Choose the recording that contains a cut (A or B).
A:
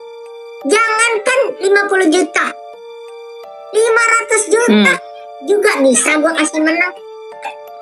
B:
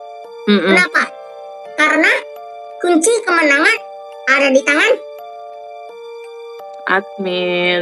B